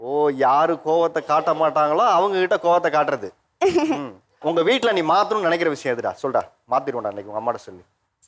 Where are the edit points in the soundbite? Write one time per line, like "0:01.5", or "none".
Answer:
0:04.4